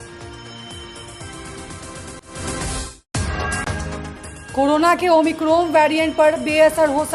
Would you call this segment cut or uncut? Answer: uncut